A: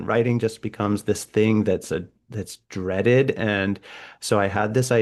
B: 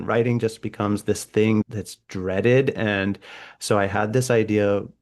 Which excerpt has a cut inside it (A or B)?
B